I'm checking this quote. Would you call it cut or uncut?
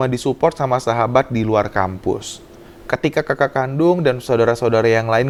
uncut